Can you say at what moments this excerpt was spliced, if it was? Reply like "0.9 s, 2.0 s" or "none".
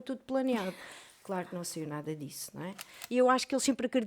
2.9 s

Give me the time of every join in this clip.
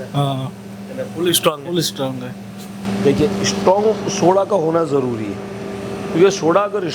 none

